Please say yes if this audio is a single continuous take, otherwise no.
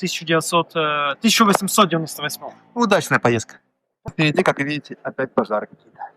no